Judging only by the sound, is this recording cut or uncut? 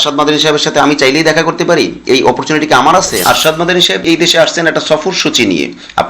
cut